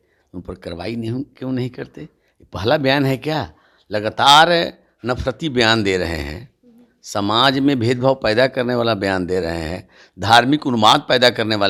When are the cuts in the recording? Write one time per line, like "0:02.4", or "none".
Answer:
none